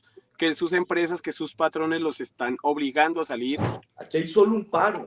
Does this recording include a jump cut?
yes; 1 cut; at 3.8 s

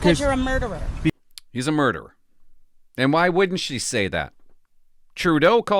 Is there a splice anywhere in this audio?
yes; 1 cut; at 1.1 s

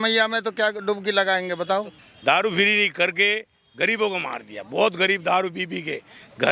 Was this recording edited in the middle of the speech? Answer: yes; 1 cut; at 2.0 s

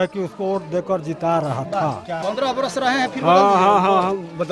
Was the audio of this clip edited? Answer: yes; 1 cut; at 2.1 s

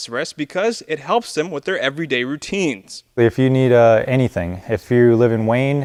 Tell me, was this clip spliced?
no; 0 cuts

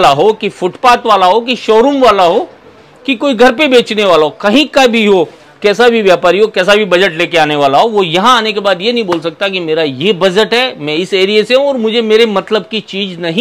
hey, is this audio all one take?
yes; 0 cuts

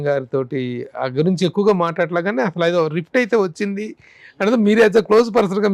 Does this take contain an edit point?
no; 0 cuts

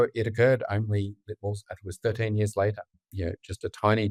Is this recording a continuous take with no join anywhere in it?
yes; 0 cuts

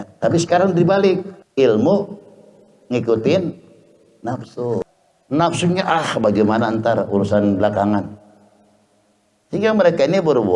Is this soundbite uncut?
no; 2 cuts; at 1.4 s, 4.8 s

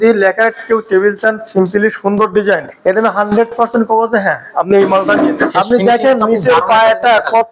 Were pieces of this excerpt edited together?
yes; 2 cuts; at 2.7 s, 5.5 s

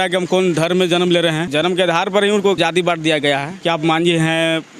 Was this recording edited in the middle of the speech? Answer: yes; 3 cuts; at 1.5 s, 2.6 s, 3.5 s

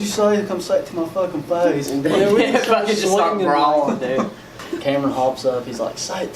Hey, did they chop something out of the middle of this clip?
yes; 1 cut; at 4.6 s

